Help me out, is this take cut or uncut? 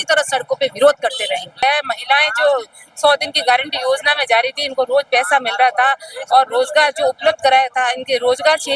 cut